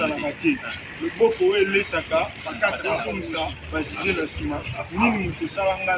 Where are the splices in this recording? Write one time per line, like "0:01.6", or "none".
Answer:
0:03.2